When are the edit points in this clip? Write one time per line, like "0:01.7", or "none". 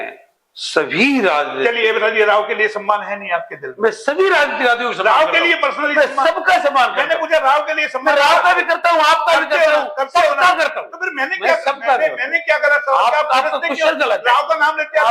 none